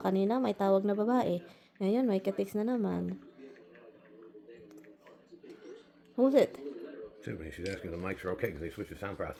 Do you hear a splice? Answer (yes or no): no